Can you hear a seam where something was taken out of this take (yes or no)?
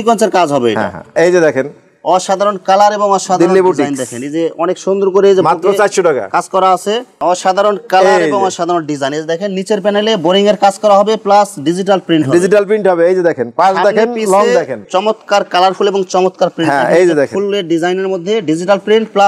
yes